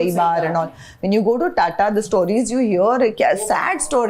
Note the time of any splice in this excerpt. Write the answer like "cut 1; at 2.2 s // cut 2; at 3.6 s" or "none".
none